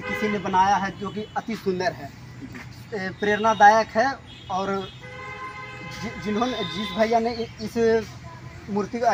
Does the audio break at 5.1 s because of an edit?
no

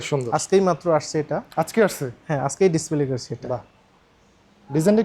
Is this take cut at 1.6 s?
no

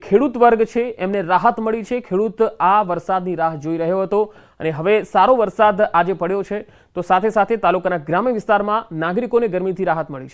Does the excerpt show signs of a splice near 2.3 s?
yes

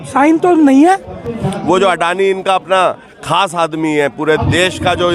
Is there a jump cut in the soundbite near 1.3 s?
yes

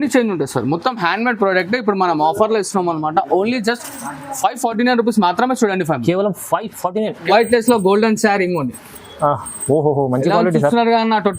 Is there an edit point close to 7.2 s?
yes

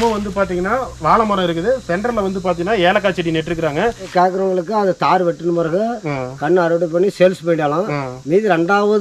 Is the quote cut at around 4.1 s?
yes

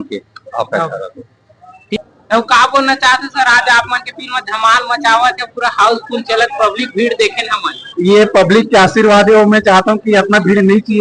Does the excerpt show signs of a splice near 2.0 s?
yes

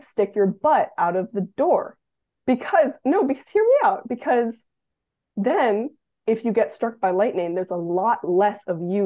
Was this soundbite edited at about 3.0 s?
no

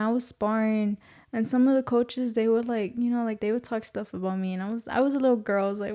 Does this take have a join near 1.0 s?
no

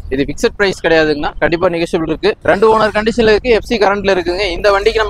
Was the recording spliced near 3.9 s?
no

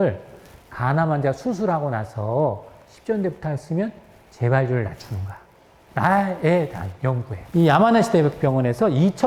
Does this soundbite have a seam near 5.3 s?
no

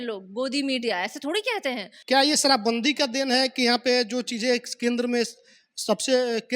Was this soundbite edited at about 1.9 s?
yes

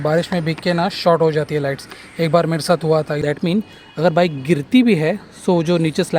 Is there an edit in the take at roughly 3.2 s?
yes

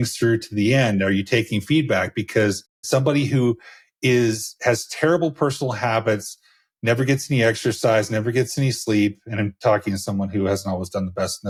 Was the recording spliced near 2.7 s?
no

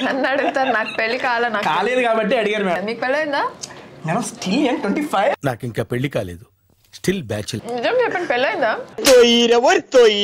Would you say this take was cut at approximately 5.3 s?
yes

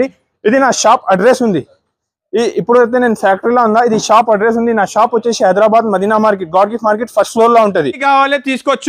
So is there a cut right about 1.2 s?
no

